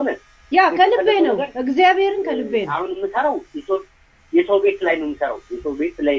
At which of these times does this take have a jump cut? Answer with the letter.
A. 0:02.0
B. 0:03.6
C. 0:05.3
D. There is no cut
D